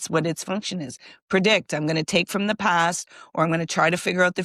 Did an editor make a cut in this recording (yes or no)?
no